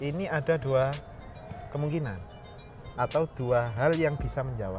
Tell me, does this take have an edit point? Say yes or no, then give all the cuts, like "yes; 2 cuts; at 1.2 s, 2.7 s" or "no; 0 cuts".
no; 0 cuts